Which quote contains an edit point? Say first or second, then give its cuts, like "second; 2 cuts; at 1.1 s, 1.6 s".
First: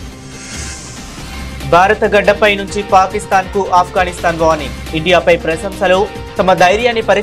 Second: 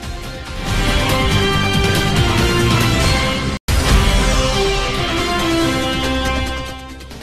second; 1 cut; at 3.6 s